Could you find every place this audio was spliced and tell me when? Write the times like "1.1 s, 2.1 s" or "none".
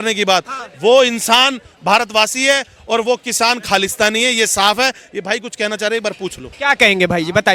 none